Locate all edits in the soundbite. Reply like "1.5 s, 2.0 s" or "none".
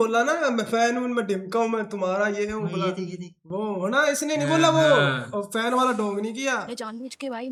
none